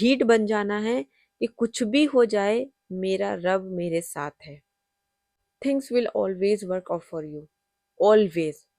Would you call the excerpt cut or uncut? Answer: uncut